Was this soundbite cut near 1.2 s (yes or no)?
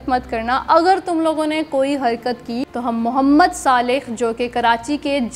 no